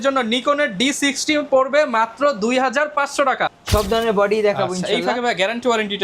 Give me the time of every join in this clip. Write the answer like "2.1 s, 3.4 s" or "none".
3.5 s